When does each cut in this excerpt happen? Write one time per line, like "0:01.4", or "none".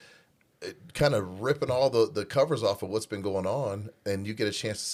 none